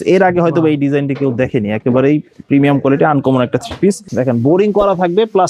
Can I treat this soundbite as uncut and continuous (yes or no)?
no